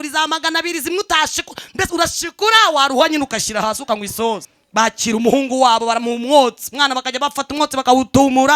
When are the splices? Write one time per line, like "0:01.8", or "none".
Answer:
0:04.5

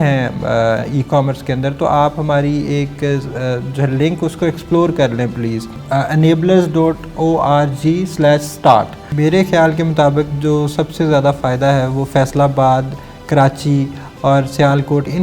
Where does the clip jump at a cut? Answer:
0:05.8
0:09.0

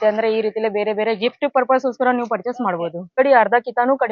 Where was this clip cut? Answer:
0:03.1

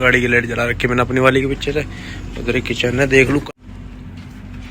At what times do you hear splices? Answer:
0:03.4

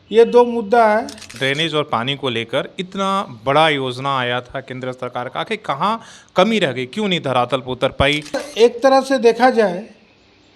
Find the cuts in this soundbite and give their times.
0:01.3
0:08.5

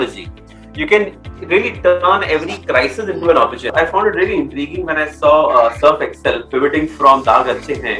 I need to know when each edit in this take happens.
0:03.7

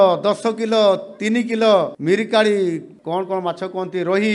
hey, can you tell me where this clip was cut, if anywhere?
0:01.9
0:02.9

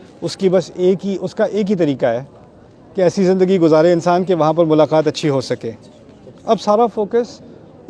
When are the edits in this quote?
none

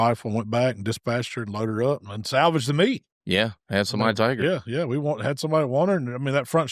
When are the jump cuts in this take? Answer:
none

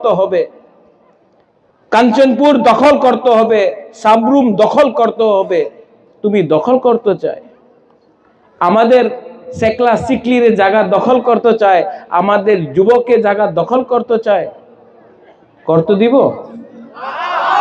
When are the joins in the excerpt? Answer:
none

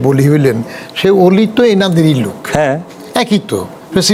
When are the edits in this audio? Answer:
none

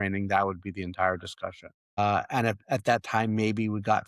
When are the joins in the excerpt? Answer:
none

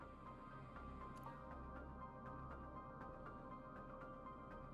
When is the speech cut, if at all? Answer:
none

